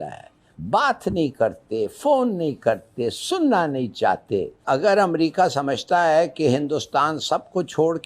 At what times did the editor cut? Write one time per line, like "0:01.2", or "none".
0:04.6